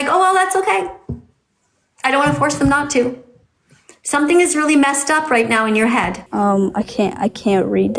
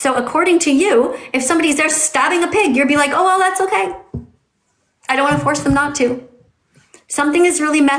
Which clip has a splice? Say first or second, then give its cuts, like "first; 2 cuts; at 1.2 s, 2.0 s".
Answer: first; 1 cut; at 6.2 s